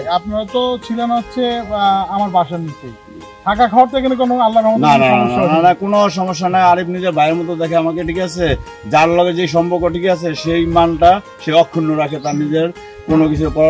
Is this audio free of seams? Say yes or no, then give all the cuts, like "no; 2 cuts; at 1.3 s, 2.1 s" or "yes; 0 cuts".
yes; 0 cuts